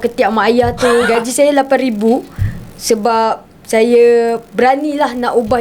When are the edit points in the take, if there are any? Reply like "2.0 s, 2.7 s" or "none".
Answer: 1.1 s